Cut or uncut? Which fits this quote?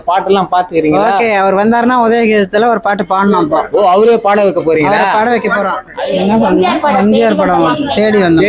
cut